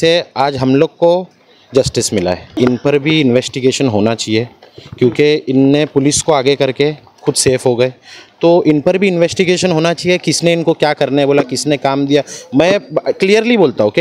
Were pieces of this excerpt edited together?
yes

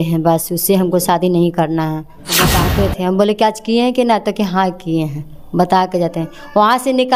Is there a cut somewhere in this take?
yes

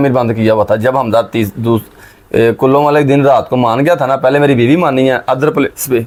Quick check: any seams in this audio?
no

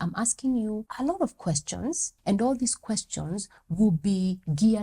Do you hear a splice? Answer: yes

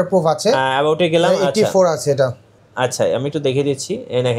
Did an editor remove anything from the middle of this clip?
yes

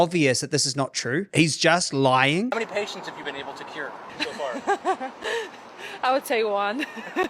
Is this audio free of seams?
no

